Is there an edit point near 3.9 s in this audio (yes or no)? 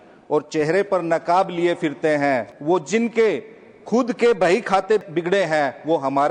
no